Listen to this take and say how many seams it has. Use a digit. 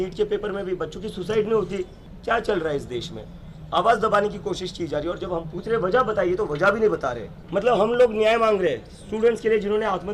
2